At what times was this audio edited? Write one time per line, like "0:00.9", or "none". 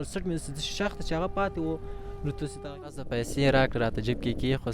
0:02.9